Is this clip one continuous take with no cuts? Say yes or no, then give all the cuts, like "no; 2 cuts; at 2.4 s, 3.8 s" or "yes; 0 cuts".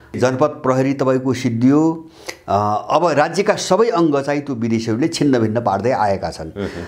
yes; 0 cuts